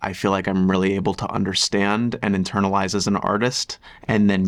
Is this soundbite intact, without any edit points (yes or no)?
yes